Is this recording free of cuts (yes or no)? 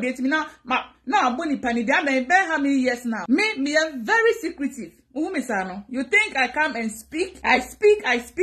no